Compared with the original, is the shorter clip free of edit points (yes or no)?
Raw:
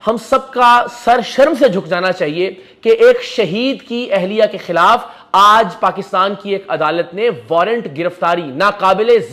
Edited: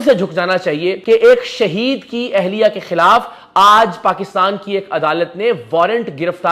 no